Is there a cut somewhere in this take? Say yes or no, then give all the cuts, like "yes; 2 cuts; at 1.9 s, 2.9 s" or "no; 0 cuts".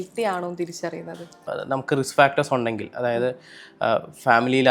yes; 1 cut; at 1.5 s